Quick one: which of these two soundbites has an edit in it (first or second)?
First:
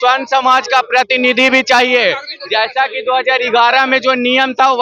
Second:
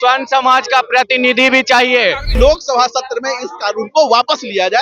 second